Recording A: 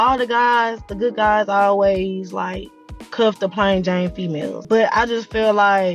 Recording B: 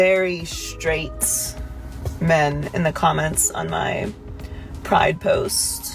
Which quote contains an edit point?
A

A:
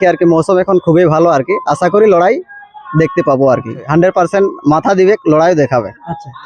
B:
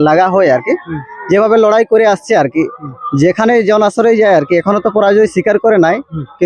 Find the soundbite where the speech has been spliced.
A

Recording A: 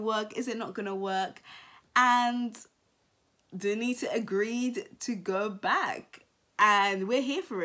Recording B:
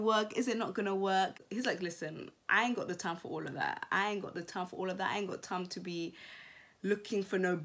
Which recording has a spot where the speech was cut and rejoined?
B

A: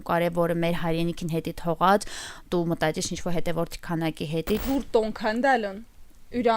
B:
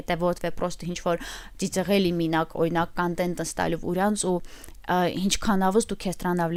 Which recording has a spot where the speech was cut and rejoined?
A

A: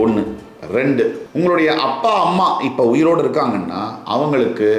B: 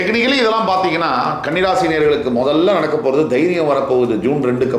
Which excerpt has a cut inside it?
A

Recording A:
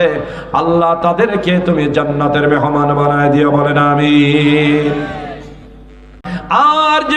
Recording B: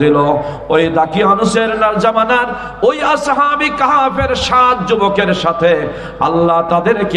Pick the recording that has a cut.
A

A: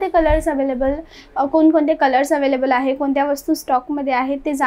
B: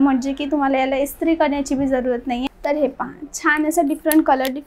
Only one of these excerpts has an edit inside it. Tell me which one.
B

